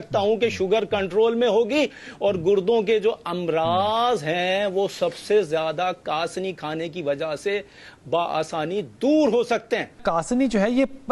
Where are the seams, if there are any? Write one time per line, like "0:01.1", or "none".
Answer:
0:10.0